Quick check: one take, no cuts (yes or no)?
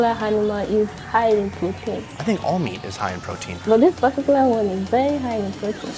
no